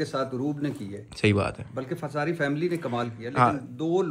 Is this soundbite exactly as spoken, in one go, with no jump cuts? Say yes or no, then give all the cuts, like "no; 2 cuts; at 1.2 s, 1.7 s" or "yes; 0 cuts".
yes; 0 cuts